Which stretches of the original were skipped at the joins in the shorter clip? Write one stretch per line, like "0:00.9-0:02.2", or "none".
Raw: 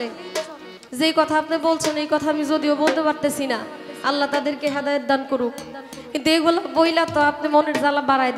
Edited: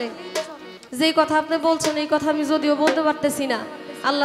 none